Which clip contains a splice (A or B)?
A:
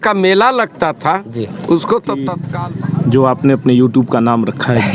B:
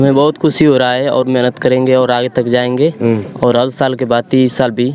A